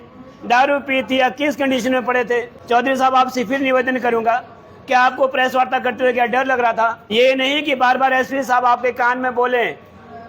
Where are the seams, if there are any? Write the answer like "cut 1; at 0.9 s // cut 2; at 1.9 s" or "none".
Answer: cut 1; at 2.5 s // cut 2; at 7.0 s